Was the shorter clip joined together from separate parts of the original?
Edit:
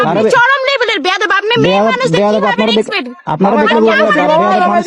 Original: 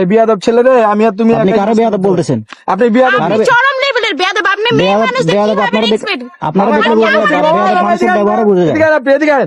no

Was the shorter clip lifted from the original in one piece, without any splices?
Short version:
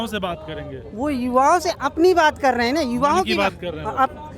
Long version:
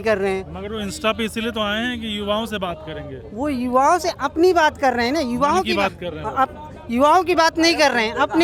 yes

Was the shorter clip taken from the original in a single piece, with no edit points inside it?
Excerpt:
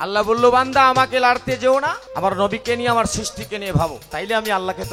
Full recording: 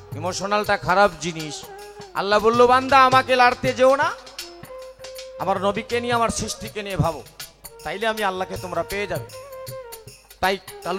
no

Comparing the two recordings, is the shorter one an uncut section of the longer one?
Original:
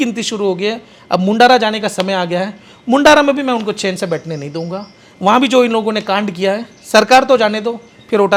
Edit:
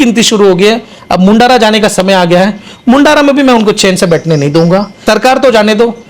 no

